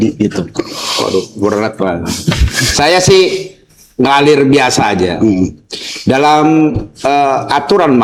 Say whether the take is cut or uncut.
uncut